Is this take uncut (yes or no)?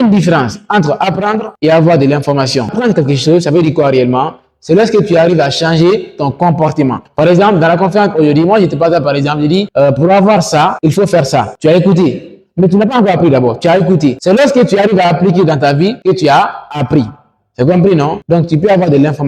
yes